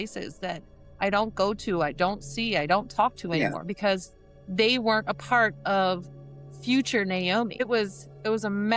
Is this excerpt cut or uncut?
cut